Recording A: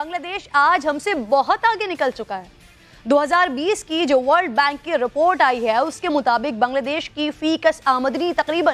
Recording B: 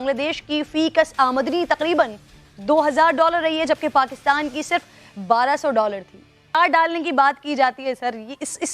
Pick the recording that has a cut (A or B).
B